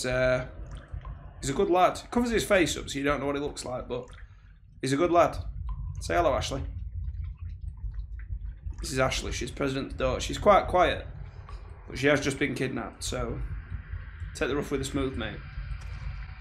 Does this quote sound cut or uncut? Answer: uncut